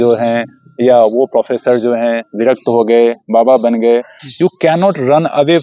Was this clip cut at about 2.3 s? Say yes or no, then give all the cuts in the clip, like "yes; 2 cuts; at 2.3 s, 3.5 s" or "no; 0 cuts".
no; 1 cut; at 4.2 s